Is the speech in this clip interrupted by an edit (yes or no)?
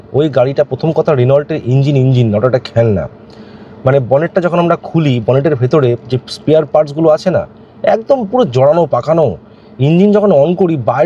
no